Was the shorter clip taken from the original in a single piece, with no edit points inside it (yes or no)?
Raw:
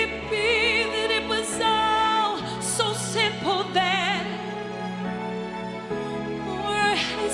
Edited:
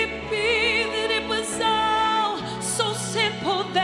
yes